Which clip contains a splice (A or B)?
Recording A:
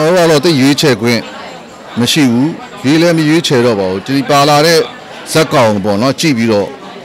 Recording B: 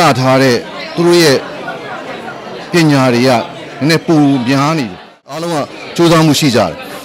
B